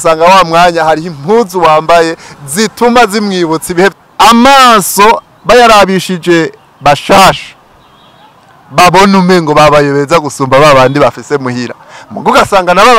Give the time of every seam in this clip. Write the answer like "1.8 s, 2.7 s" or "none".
3.9 s